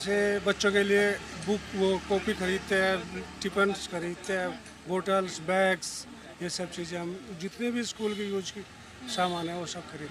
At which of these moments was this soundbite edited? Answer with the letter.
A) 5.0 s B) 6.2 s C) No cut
C